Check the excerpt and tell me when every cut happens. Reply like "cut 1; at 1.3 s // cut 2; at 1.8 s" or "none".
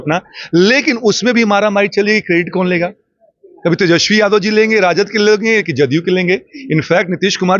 none